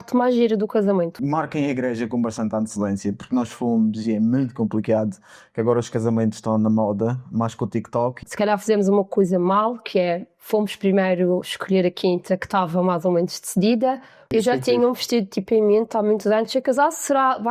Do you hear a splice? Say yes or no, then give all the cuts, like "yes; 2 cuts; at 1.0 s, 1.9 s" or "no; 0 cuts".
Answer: yes; 3 cuts; at 1.1 s, 8.2 s, 14.1 s